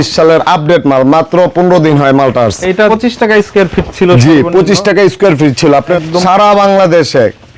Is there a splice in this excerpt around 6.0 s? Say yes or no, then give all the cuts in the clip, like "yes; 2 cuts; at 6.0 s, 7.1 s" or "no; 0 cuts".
yes; 2 cuts; at 2.9 s, 6.0 s